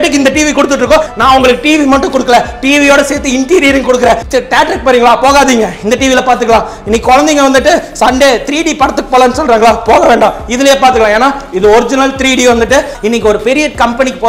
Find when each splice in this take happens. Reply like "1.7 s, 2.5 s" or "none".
1.1 s, 4.2 s, 12.9 s